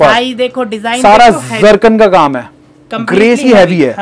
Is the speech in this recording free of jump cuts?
yes; 0 cuts

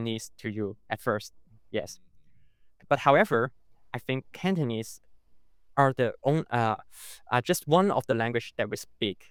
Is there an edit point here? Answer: no; 0 cuts

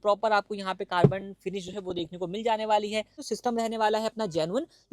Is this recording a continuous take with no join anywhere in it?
no; 1 cut; at 3.2 s

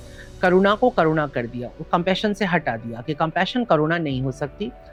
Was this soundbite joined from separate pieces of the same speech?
no; 0 cuts

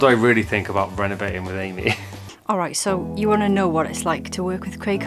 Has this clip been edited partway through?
no; 0 cuts

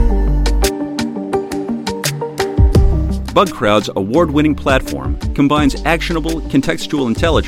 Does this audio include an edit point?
no; 0 cuts

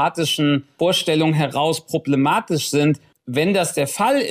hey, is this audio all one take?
no; 1 cut; at 3.1 s

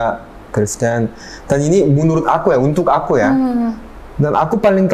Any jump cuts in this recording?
no; 0 cuts

